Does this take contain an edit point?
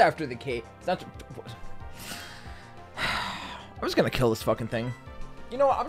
no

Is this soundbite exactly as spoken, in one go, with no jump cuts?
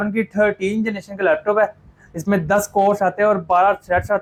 yes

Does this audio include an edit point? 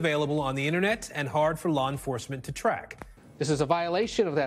yes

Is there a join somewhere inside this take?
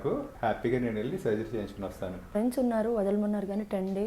yes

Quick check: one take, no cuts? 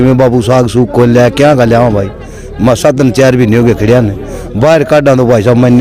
yes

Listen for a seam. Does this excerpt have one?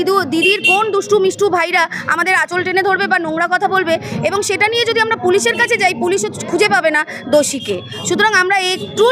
no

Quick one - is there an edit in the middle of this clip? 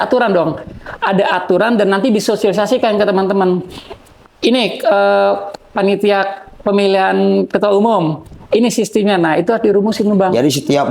no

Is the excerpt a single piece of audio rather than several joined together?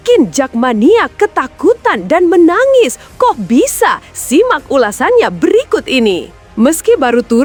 yes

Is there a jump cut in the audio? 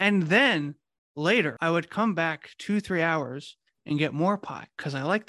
yes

